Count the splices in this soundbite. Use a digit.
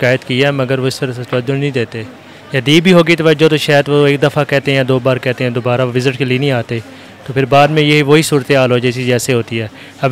0